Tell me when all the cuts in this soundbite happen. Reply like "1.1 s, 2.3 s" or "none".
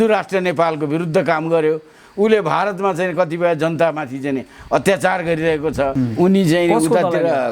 5.9 s